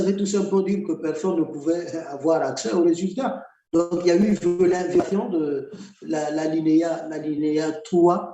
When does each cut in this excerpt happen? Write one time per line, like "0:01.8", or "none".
none